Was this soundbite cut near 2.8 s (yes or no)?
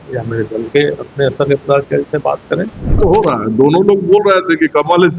yes